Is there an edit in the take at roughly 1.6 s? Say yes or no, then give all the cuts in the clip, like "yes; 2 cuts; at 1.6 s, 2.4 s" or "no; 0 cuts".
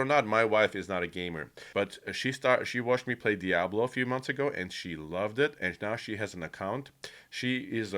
yes; 1 cut; at 1.6 s